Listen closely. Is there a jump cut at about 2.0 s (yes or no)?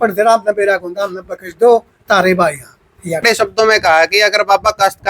no